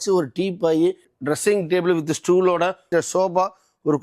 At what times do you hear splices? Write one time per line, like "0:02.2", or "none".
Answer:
0:01.0